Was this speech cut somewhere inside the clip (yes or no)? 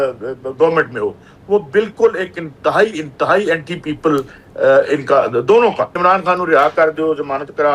yes